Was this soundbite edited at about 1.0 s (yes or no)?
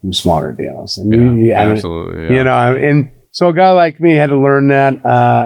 no